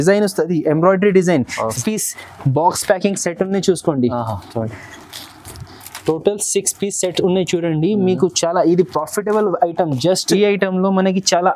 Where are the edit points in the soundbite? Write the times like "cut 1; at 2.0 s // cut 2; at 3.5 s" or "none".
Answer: cut 1; at 1.8 s // cut 2; at 10.2 s